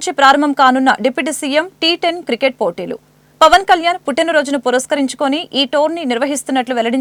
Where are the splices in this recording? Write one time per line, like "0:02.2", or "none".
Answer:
none